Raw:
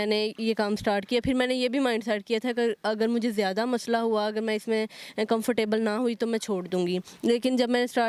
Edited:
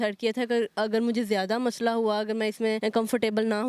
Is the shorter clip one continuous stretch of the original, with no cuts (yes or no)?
no